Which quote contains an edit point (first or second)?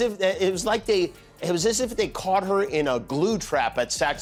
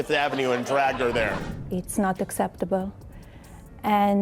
second